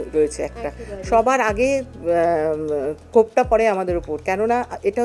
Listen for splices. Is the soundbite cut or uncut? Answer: uncut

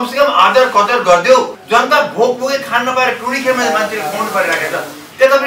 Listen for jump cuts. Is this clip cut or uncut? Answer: cut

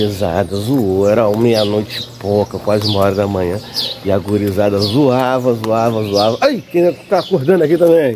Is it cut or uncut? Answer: uncut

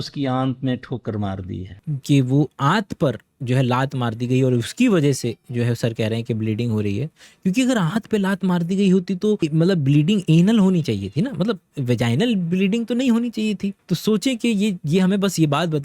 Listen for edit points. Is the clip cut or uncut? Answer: cut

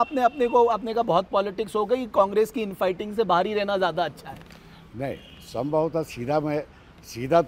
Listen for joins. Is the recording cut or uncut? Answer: uncut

